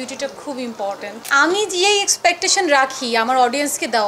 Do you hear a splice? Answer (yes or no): yes